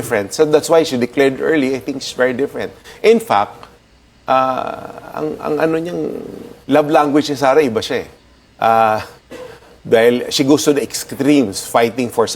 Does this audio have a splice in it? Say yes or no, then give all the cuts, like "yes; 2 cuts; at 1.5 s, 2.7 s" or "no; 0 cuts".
no; 0 cuts